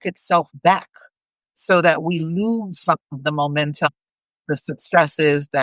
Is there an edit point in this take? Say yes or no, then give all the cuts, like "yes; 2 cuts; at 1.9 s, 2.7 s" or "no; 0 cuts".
yes; 1 cut; at 3.9 s